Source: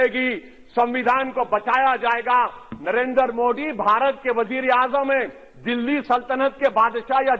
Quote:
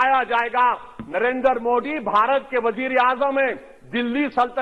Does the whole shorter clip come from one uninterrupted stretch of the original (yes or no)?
yes